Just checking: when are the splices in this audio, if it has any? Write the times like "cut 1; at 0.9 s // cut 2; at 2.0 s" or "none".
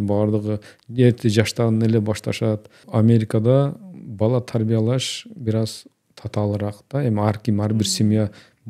cut 1; at 2.8 s